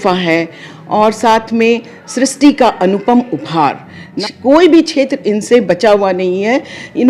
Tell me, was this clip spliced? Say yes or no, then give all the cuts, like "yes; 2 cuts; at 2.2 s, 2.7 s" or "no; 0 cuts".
yes; 1 cut; at 4.1 s